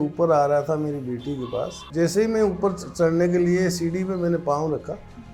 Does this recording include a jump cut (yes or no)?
yes